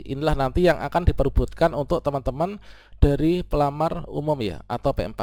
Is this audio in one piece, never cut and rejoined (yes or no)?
yes